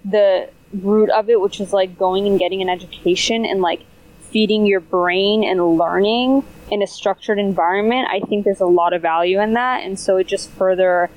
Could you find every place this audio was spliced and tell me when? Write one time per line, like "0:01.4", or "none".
none